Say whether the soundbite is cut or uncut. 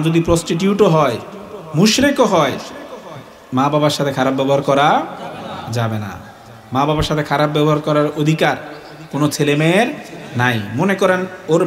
uncut